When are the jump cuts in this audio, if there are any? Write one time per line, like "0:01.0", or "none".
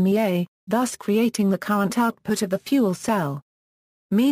0:02.2